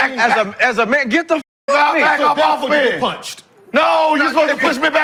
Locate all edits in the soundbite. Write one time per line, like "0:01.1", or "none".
none